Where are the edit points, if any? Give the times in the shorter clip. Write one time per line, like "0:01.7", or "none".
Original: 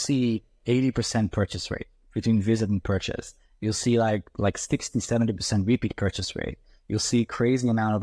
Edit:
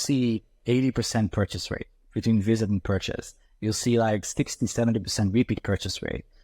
0:04.3